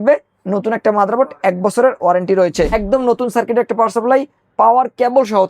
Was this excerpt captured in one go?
no; 1 cut; at 2.7 s

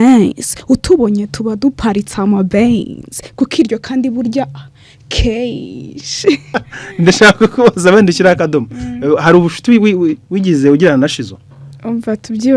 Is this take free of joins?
no; 1 cut; at 6.6 s

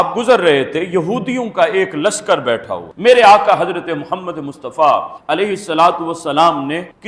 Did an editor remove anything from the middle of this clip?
yes; 1 cut; at 2.8 s

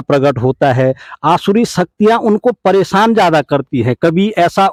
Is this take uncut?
yes; 0 cuts

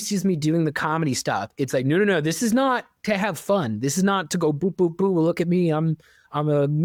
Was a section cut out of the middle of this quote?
no; 0 cuts

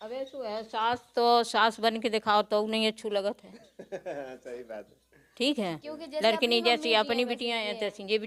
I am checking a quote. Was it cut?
no; 0 cuts

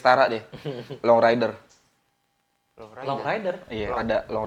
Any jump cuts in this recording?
no; 0 cuts

